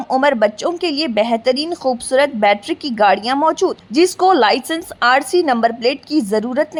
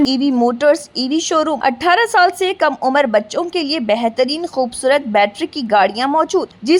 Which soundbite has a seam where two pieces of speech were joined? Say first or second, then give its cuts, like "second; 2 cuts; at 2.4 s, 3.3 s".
second; 1 cut; at 1.6 s